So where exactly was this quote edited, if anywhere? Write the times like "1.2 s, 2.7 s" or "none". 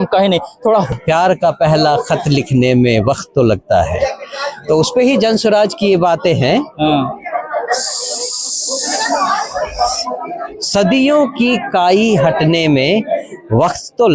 0.9 s